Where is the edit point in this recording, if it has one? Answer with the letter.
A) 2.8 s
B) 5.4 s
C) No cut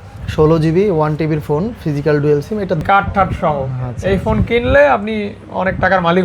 A